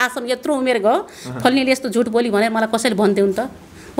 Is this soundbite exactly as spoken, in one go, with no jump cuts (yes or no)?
yes